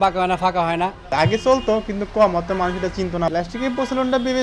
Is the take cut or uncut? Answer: cut